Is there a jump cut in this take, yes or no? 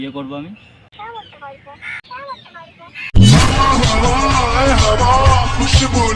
no